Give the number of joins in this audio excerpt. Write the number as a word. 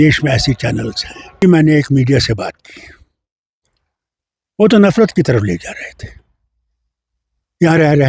one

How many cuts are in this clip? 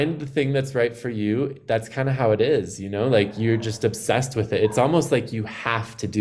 zero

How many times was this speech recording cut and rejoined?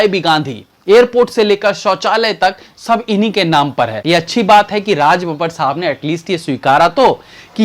one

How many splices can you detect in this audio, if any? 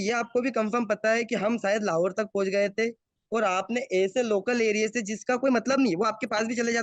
zero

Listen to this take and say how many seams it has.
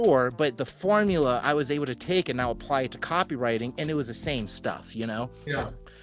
zero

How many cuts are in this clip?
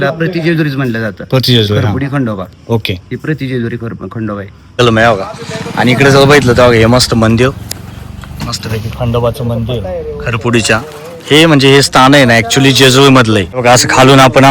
one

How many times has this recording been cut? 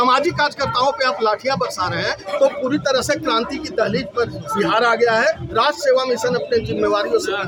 zero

